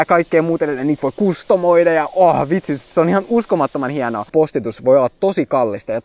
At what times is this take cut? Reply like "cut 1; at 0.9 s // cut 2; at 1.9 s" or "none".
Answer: cut 1; at 4.2 s